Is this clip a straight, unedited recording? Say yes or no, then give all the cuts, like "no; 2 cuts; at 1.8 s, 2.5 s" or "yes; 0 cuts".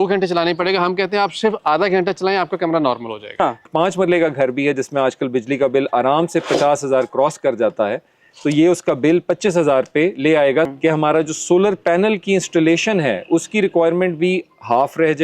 no; 2 cuts; at 3.6 s, 10.7 s